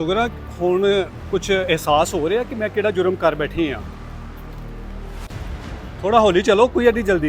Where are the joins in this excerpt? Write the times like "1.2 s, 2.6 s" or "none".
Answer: 3.8 s, 5.3 s